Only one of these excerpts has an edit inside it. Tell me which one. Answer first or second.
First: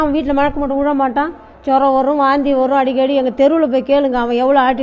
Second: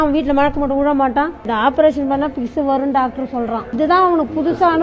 second